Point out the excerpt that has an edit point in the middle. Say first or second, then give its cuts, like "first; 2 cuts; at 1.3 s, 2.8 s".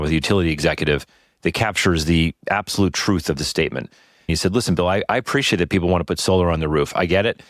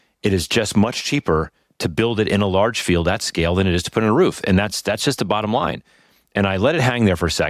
first; 1 cut; at 4.3 s